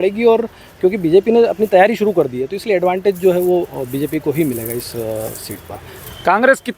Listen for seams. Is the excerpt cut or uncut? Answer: uncut